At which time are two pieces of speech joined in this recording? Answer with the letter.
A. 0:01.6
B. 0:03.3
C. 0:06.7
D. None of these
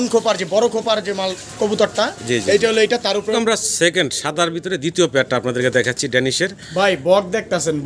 B